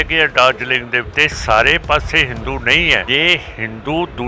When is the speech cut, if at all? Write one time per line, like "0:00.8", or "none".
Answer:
0:01.1
0:03.0